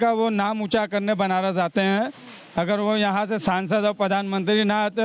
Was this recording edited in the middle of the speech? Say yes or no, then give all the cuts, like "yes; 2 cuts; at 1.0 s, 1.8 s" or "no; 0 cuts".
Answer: no; 0 cuts